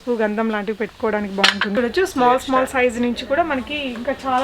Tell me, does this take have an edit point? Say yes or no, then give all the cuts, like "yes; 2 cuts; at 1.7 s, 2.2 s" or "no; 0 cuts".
yes; 1 cut; at 1.7 s